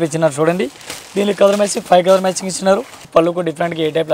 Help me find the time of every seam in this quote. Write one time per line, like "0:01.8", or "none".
0:03.1